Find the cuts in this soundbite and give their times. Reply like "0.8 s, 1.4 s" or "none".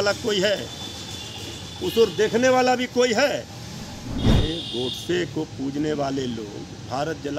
4.3 s